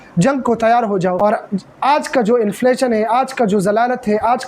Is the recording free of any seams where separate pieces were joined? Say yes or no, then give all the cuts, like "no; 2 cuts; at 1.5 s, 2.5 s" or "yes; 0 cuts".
no; 1 cut; at 1.2 s